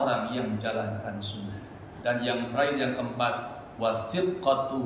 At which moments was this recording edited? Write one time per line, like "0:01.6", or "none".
0:01.9

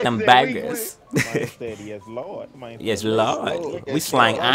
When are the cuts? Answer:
0:00.9

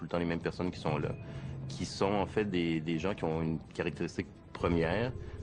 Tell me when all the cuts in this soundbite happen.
0:01.4

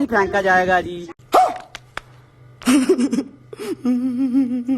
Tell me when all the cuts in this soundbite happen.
none

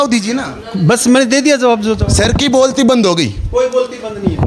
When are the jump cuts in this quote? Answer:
none

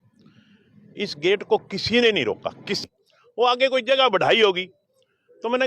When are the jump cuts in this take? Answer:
0:02.8

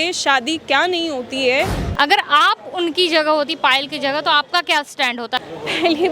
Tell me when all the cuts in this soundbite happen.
0:01.8
0:05.4

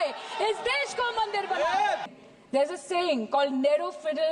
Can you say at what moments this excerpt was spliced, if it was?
0:02.1

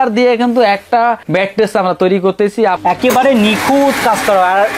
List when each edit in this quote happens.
0:01.2
0:02.8

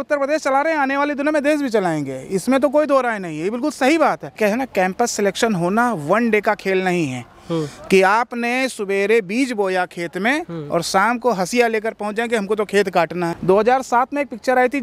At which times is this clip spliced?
0:04.3
0:13.4

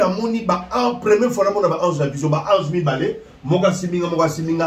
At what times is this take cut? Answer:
none

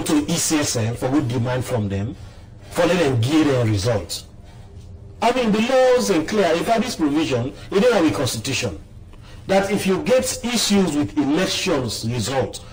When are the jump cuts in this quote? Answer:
none

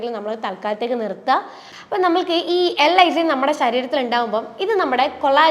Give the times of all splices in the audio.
0:01.6

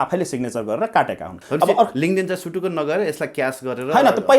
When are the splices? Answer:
0:01.3

